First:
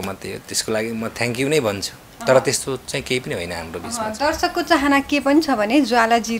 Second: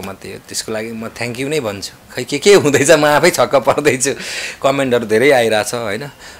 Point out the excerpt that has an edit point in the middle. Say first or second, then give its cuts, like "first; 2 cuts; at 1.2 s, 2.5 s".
second; 1 cut; at 2.0 s